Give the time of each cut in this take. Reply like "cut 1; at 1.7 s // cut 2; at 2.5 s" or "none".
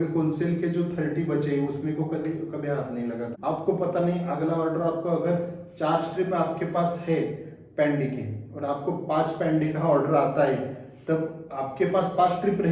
cut 1; at 3.3 s